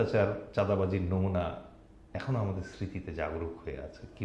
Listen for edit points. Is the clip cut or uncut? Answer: uncut